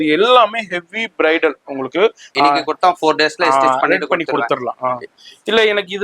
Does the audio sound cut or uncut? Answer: cut